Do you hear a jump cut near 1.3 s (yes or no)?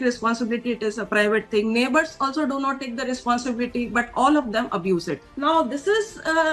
no